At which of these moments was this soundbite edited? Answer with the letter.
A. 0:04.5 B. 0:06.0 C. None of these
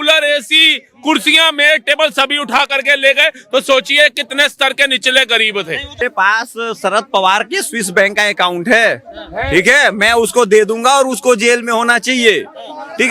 B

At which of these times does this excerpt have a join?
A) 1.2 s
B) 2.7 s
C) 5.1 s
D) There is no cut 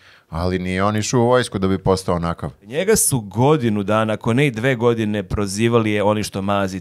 B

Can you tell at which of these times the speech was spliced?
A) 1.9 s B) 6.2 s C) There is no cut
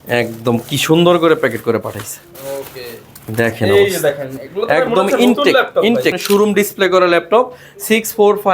B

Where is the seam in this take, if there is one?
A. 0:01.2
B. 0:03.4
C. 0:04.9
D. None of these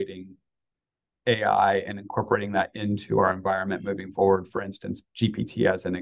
C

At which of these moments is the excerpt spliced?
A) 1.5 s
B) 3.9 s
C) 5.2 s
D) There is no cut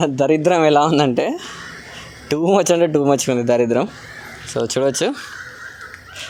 D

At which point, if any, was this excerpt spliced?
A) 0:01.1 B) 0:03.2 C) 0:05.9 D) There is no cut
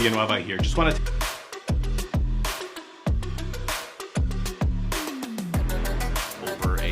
A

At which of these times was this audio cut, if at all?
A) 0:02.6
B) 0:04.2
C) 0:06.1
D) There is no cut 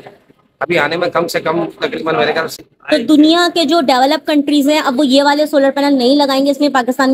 A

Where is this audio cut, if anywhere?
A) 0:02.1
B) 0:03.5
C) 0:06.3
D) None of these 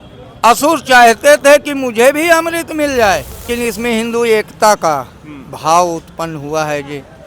B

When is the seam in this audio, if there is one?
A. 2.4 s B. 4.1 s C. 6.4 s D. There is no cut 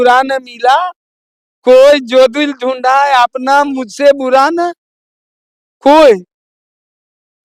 D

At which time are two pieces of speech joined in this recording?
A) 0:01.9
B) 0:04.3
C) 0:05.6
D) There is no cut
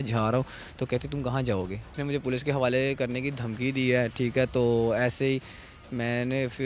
A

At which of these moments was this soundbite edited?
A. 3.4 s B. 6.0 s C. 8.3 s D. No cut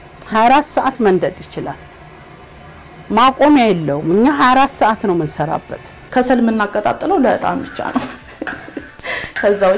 B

